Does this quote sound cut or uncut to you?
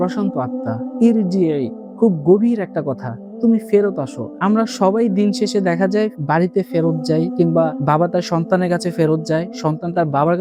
uncut